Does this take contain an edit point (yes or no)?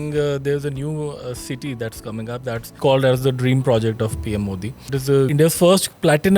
yes